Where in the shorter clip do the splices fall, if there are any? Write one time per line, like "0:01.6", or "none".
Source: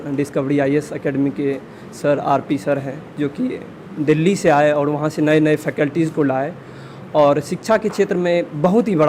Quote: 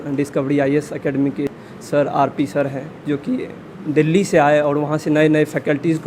0:01.5

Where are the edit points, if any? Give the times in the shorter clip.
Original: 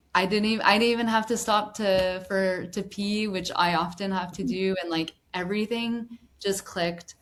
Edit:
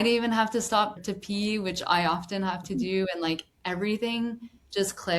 0:01.0

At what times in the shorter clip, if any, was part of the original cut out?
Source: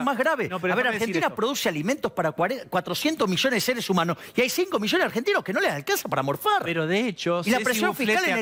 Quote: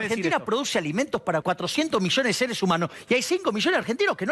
0:01.4

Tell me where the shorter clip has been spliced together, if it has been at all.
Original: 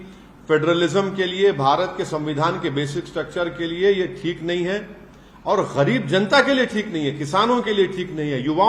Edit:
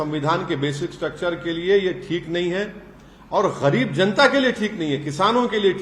none

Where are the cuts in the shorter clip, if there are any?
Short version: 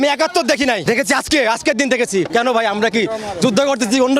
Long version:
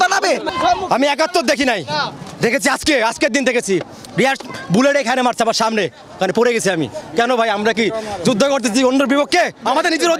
0:00.8
0:02.3

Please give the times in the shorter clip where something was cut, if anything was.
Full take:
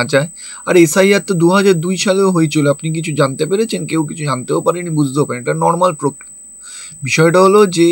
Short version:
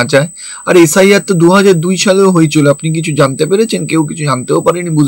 none

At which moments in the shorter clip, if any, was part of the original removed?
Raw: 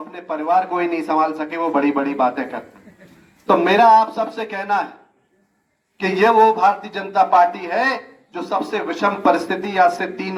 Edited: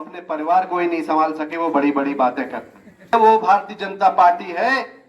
0:03.1

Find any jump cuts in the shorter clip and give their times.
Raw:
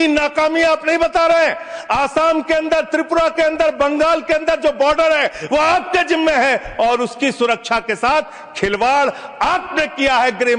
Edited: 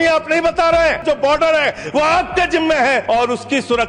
0:01.0
0:03.0

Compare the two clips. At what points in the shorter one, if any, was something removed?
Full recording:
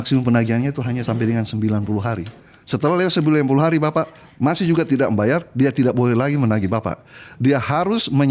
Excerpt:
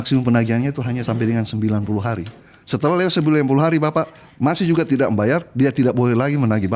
none

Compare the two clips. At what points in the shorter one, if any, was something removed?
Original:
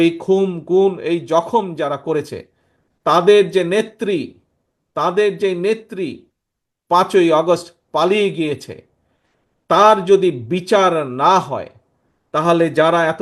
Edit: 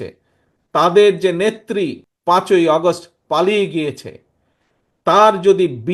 0:02.1

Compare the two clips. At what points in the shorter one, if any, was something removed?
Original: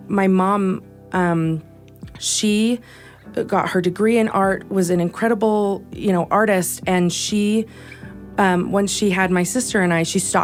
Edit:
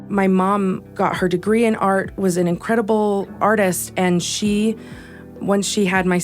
0:00.9
0:03.4
0:05.4

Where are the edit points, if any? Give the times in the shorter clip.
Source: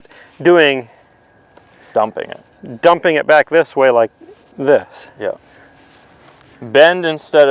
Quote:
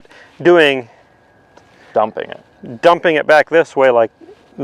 none

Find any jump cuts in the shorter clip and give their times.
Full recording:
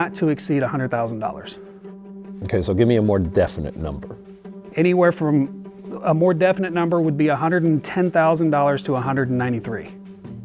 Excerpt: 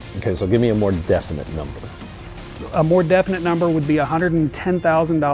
0:02.3

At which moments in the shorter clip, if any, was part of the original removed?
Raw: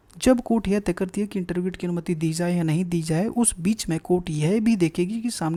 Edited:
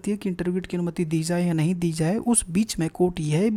none

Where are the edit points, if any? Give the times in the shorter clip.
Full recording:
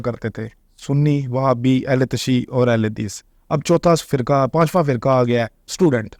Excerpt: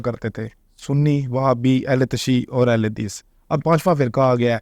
0:03.6

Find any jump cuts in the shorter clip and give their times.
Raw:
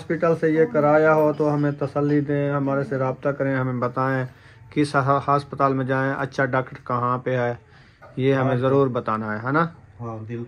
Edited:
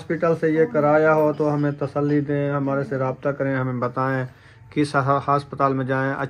none

